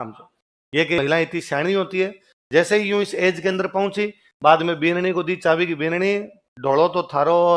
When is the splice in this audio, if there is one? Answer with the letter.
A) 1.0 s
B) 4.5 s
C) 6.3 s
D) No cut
A